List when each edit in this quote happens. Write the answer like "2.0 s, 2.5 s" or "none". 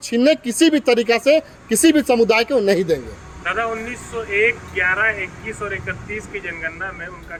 none